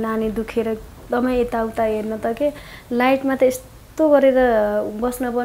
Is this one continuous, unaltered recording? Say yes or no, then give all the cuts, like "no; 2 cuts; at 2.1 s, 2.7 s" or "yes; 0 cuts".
yes; 0 cuts